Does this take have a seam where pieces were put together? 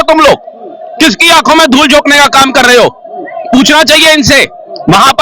no; 0 cuts

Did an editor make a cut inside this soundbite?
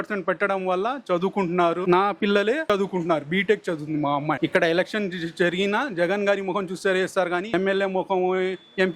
yes; 4 cuts; at 1.8 s, 2.7 s, 4.4 s, 7.5 s

